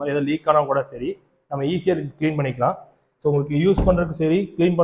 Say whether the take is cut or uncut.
uncut